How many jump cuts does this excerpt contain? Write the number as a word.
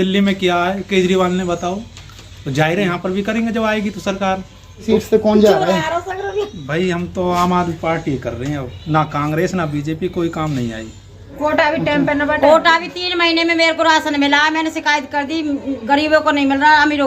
two